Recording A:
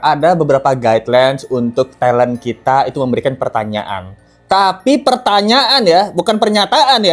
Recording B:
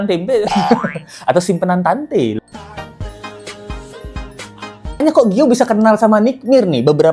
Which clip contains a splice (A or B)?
B